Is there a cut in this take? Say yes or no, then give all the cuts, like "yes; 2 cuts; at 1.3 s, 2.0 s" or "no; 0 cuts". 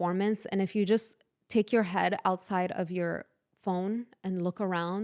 no; 0 cuts